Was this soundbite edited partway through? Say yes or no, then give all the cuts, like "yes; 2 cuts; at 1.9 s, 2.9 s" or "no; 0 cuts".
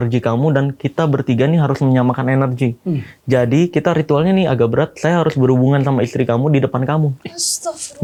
no; 0 cuts